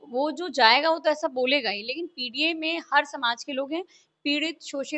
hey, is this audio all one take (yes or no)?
yes